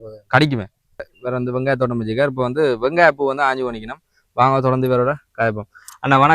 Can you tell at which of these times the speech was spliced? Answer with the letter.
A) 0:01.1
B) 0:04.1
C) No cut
A